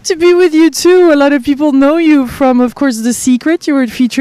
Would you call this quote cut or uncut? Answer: cut